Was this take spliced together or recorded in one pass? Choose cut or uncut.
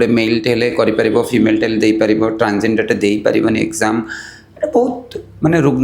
uncut